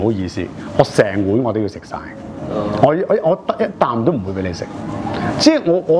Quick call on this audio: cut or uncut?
uncut